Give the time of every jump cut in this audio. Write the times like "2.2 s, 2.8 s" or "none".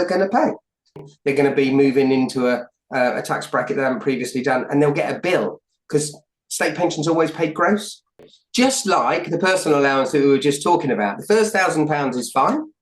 1.1 s, 8.3 s